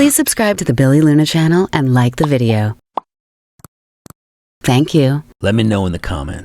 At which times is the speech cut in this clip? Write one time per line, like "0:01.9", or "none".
0:03.9
0:05.3